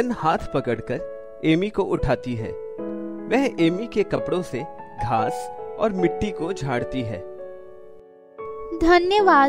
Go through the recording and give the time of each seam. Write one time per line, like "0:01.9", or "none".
0:06.9
0:08.6